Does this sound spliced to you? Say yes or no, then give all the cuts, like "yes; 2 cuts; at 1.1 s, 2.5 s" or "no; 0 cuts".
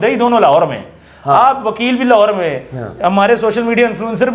no; 0 cuts